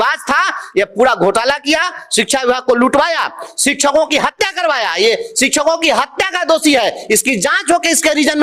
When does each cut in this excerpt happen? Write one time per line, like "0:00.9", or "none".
none